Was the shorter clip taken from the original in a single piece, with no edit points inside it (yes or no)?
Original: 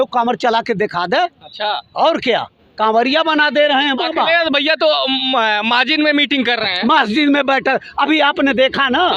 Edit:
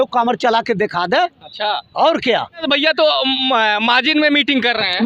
no